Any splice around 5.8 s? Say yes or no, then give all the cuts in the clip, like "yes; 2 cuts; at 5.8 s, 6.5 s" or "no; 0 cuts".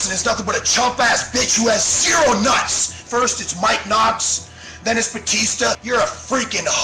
yes; 1 cut; at 5.8 s